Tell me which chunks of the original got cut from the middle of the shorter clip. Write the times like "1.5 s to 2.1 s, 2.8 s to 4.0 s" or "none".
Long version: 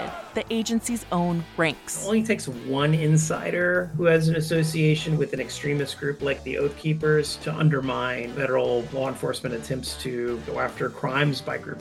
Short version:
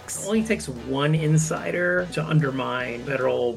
3.9 s to 7.4 s